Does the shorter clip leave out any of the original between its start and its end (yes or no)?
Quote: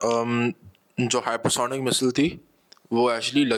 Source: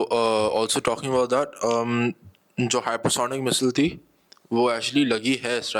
no